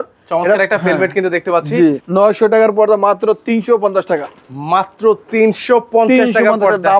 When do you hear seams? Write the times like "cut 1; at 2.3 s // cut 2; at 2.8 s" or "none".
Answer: cut 1; at 2.0 s